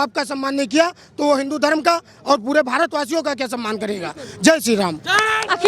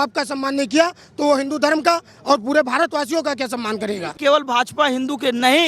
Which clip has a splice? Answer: second; 1 cut; at 4.1 s

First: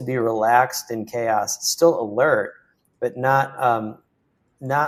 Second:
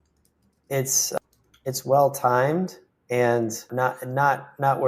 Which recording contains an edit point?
second; 2 cuts; at 1.2 s, 3.7 s

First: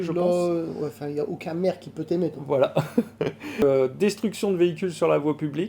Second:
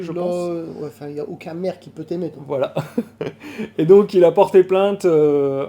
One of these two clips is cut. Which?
first; 1 cut; at 3.6 s

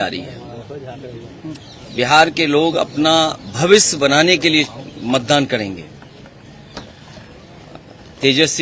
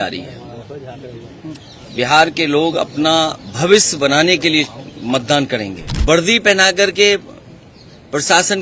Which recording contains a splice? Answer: second; 1 cut; at 5.9 s

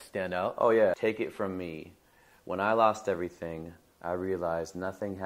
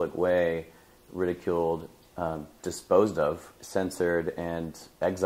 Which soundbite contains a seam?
first; 1 cut; at 1.0 s

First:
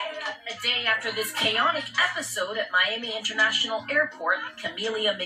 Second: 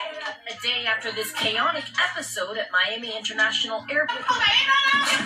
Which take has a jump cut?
second; 1 cut; at 4.1 s

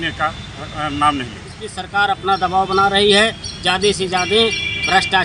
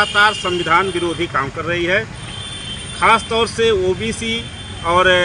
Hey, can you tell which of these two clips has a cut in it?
first; 1 cut; at 1.7 s

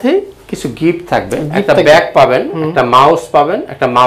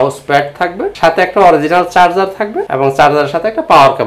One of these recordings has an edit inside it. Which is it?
second; 2 cuts; at 0.9 s, 2.6 s

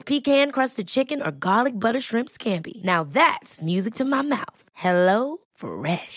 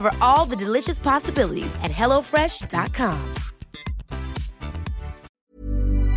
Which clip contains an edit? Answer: second; 1 cut; at 5.3 s

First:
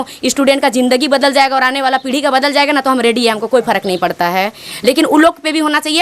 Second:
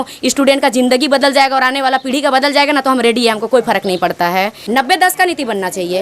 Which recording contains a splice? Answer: second; 1 cut; at 4.6 s

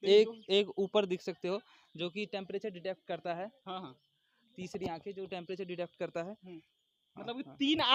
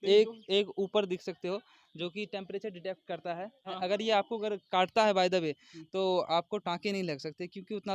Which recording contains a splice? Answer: second; 1 cut; at 3.8 s

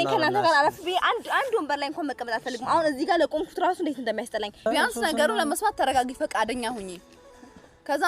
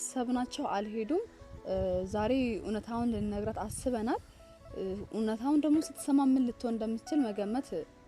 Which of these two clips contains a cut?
first; 1 cut; at 4.7 s

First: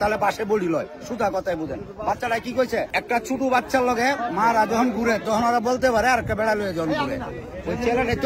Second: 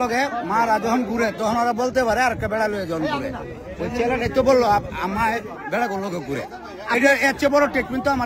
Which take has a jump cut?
first; 1 cut; at 2.9 s

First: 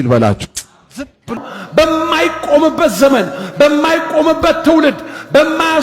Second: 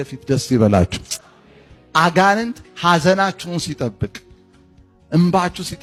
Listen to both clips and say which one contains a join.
first; 1 cut; at 1.3 s

